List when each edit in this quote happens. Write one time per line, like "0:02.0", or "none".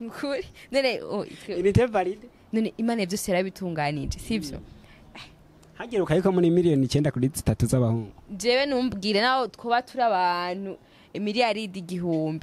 none